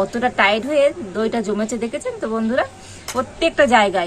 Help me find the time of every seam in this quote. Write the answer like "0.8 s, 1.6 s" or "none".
3.0 s